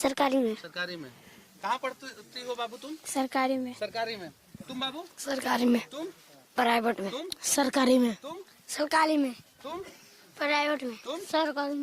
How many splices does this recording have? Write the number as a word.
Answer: zero